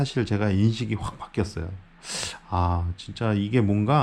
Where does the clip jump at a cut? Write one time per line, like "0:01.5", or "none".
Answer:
none